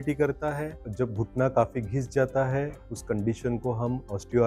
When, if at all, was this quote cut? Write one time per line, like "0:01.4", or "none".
none